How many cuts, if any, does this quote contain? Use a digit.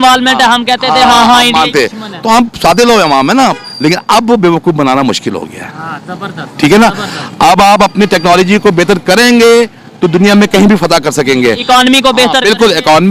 0